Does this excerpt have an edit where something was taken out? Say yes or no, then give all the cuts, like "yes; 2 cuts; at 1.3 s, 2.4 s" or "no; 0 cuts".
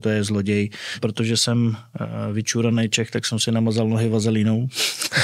yes; 1 cut; at 1.0 s